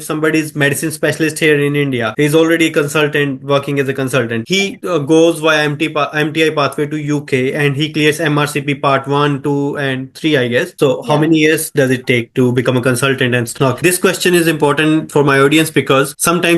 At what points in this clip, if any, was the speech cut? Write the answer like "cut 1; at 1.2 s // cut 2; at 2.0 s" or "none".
cut 1; at 10.7 s // cut 2; at 13.6 s